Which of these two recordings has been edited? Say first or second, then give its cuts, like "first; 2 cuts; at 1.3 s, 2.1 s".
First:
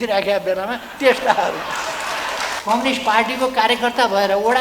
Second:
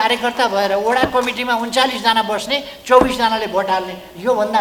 first; 1 cut; at 2.6 s